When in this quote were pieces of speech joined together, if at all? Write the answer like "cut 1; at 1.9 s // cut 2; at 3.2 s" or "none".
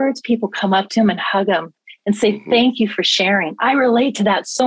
none